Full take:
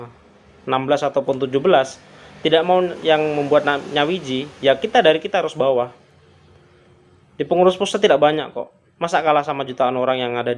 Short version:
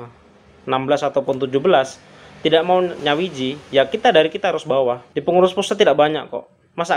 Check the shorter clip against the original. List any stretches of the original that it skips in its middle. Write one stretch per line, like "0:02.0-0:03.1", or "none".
0:03.0-0:03.9
0:06.0-0:07.3